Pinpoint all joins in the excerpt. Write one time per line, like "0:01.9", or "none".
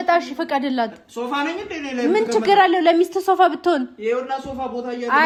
none